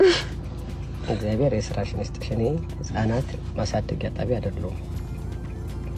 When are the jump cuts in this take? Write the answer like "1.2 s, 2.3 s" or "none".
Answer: none